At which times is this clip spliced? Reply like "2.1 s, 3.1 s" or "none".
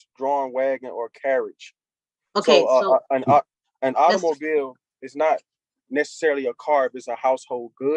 none